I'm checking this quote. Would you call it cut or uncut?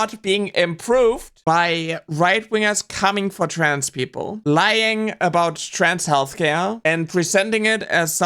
uncut